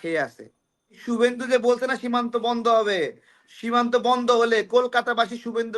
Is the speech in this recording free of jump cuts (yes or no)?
no